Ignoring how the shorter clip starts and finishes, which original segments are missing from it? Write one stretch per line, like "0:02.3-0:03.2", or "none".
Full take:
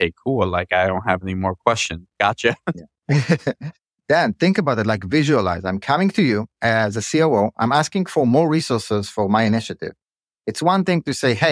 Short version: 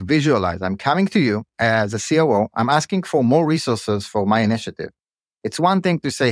none